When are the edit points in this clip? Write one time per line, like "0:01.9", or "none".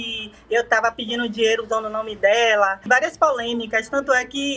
0:02.8